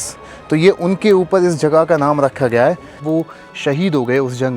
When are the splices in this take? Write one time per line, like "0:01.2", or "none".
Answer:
0:02.9